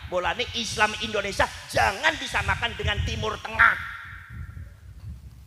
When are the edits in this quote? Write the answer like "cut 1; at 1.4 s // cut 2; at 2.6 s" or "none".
none